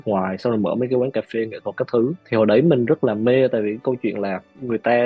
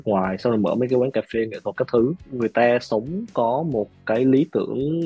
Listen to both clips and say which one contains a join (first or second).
second